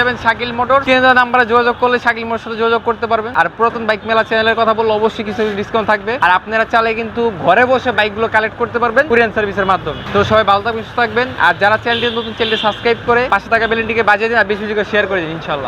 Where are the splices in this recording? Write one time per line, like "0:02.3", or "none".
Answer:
0:00.8
0:03.3
0:06.2
0:09.1
0:10.0
0:11.3
0:13.3